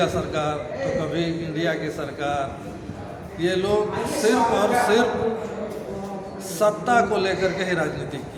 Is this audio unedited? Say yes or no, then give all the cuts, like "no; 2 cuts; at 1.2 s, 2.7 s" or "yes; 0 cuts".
yes; 0 cuts